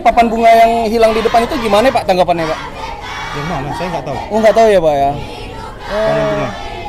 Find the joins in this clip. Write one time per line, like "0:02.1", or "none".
none